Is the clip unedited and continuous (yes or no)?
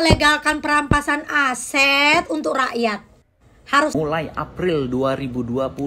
no